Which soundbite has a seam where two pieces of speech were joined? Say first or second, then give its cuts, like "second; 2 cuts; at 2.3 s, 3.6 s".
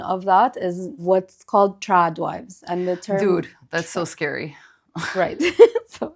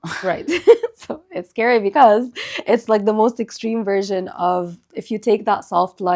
first; 1 cut; at 1.0 s